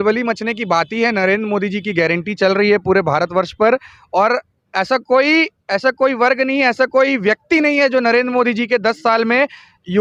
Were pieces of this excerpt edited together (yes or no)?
no